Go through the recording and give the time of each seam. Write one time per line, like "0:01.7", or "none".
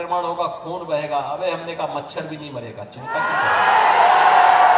none